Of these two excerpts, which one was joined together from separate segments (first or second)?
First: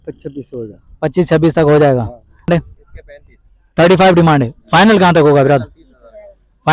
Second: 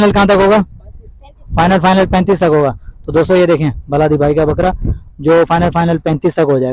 first